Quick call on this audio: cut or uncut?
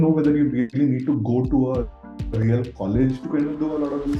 uncut